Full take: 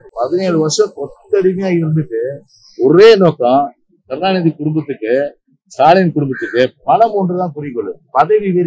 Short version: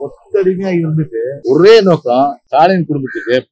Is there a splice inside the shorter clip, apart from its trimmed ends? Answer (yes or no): yes